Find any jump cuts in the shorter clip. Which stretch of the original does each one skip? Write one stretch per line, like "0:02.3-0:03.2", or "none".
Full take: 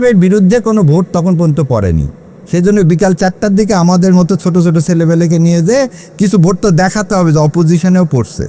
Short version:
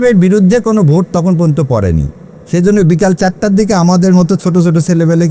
none